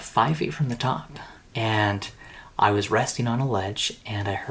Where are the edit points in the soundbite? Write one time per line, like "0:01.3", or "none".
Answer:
0:01.4

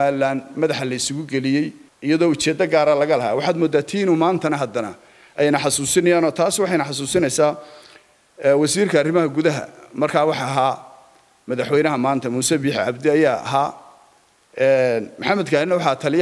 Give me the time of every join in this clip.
0:01.9

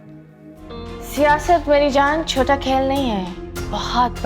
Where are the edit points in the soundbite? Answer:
0:01.0

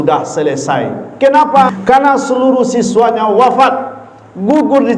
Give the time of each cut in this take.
0:01.8

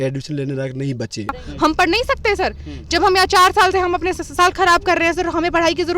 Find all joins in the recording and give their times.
0:01.4

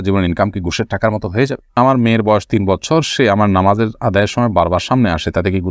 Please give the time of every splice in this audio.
0:01.8

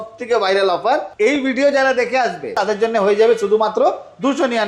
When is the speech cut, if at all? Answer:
0:01.1
0:02.6

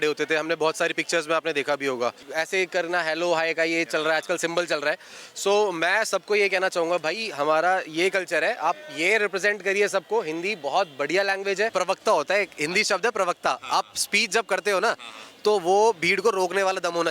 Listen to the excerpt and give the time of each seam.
0:02.3
0:11.7

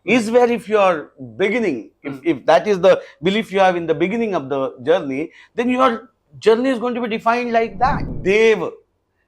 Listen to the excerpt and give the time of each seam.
0:08.1

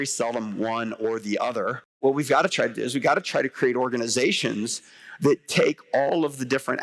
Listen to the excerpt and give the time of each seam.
0:02.0

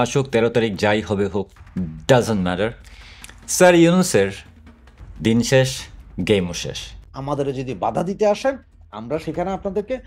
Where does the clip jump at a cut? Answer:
0:07.0

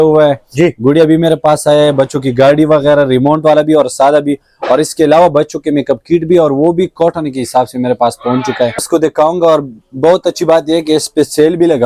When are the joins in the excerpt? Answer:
none

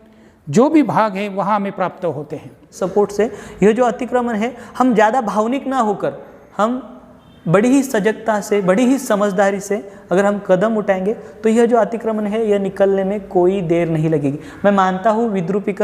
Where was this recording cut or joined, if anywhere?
0:02.8

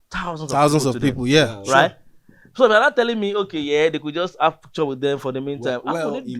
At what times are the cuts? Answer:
none

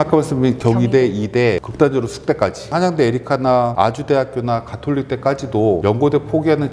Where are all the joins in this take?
0:01.7
0:02.7
0:03.7
0:05.8

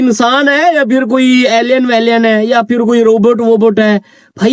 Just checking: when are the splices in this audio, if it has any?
none

